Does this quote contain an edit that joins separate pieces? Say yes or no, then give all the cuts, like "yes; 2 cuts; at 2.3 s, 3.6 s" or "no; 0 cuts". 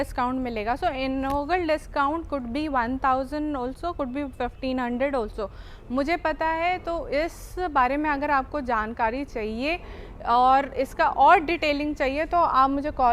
no; 0 cuts